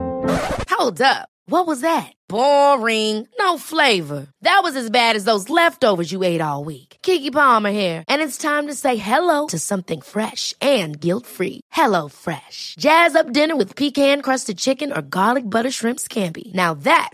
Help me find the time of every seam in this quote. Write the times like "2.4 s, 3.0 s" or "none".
none